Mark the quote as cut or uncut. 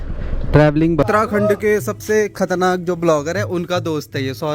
cut